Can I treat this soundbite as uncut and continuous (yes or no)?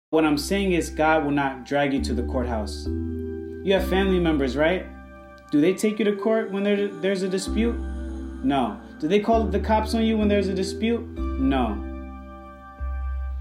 yes